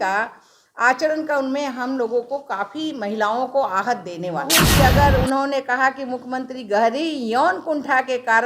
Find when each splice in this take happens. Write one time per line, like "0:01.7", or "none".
0:04.7